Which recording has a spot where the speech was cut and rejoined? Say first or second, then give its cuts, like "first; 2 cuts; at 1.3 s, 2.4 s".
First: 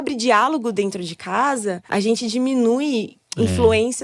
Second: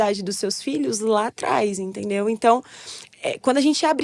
first; 1 cut; at 1.8 s